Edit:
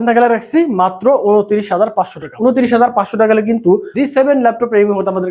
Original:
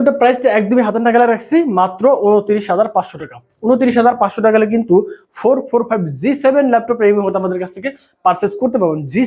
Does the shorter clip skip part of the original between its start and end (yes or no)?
yes